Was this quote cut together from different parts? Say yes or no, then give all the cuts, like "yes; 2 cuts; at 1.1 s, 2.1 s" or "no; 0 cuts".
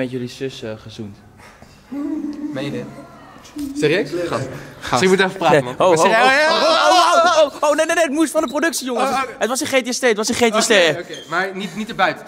no; 0 cuts